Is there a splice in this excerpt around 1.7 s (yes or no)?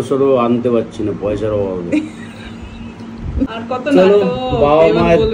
no